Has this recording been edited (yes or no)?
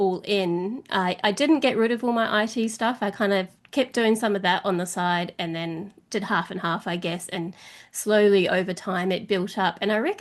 no